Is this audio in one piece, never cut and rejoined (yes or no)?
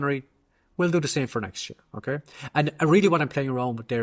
yes